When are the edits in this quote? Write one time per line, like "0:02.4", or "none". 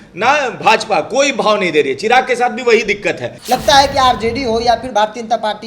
0:03.3